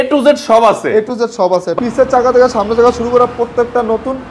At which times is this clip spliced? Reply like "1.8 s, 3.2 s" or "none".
1.7 s